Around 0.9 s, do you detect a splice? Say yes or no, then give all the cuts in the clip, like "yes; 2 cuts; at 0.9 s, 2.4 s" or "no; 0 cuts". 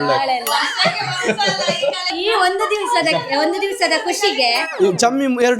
no; 2 cuts; at 2.1 s, 4.6 s